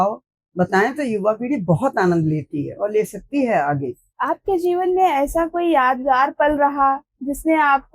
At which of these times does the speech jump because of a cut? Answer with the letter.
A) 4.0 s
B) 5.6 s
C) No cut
A